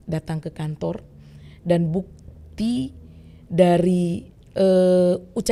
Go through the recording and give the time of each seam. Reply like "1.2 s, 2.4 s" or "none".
none

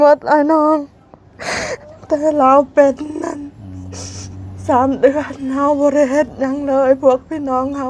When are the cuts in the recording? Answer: none

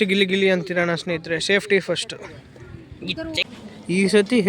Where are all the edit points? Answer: 3.5 s

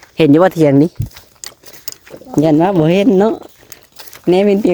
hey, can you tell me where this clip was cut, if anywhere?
none

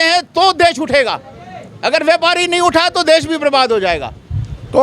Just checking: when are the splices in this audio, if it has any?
none

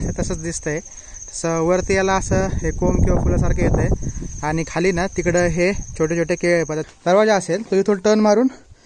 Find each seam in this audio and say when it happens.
6.8 s

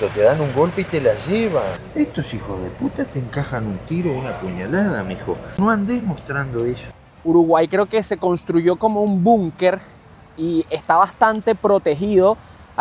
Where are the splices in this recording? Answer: 1.8 s, 5.6 s, 6.9 s

